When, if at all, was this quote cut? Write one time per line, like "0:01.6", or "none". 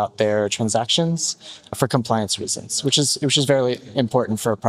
0:01.7